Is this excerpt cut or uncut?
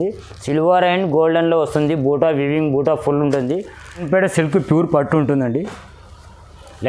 cut